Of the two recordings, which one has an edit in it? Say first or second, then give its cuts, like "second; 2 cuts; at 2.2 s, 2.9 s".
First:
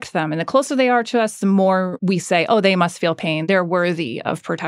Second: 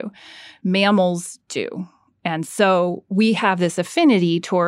first; 2 cuts; at 2.0 s, 3.4 s